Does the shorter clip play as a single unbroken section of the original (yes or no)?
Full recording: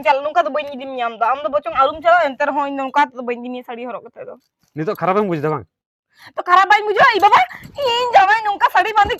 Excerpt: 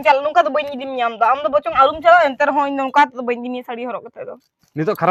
yes